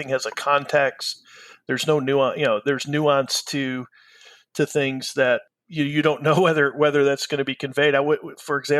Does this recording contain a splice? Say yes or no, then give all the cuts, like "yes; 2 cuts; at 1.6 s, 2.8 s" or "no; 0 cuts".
no; 0 cuts